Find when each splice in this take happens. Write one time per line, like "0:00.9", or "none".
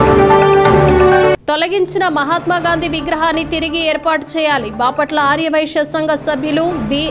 0:01.2